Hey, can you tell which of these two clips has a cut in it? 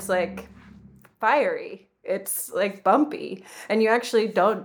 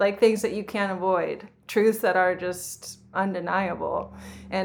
second; 1 cut; at 3.1 s

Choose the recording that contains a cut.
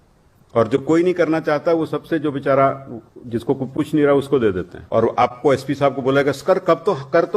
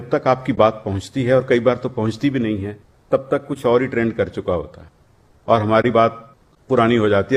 first; 1 cut; at 4.7 s

